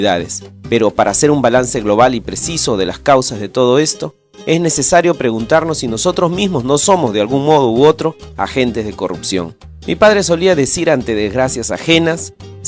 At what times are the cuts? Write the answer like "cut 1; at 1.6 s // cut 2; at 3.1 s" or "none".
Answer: cut 1; at 3.0 s